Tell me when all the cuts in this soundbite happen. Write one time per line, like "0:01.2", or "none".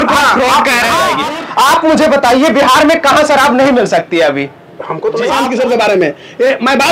0:01.2
0:05.2